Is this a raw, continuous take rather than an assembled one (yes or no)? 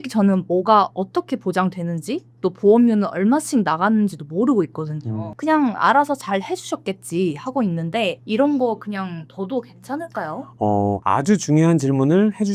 yes